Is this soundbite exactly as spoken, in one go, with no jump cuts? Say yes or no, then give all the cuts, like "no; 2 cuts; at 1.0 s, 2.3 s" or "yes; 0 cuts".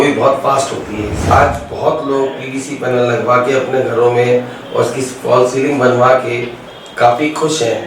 no; 1 cut; at 1.3 s